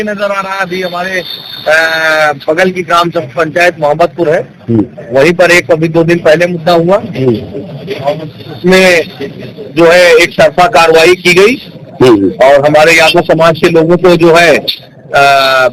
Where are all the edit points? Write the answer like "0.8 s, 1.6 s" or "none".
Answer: none